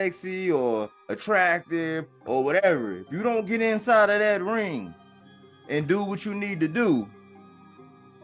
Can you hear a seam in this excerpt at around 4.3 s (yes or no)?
no